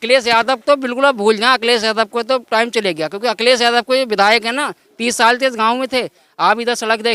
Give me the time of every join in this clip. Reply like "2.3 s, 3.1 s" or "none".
none